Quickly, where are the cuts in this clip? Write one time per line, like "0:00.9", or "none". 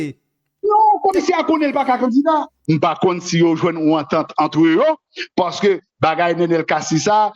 0:02.6